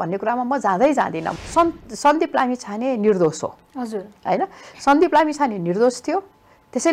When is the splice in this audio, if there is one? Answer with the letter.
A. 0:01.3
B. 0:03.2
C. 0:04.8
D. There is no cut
A